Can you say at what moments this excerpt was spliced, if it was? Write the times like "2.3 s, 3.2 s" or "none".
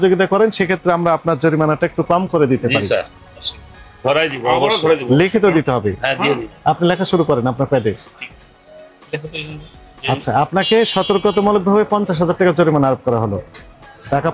none

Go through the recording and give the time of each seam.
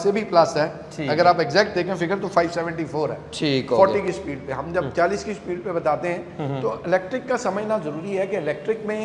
none

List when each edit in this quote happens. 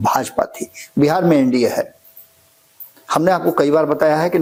none

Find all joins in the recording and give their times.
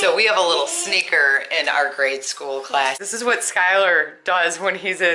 3.2 s

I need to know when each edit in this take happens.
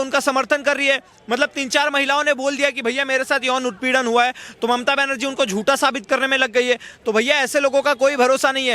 none

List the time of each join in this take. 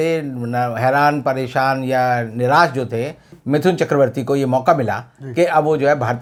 none

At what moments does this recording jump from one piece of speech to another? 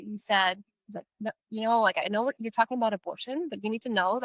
none

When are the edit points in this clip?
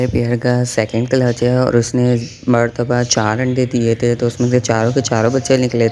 none

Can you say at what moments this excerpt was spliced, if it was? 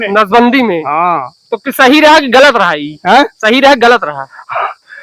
none

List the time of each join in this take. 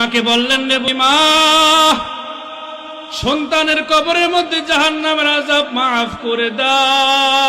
0.9 s

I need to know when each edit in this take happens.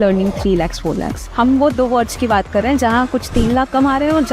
1.2 s

